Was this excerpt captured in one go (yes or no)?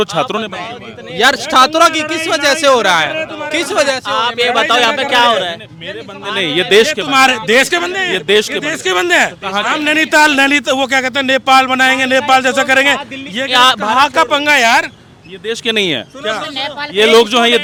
yes